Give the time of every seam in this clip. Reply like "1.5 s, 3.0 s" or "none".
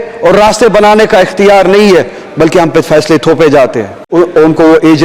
4.0 s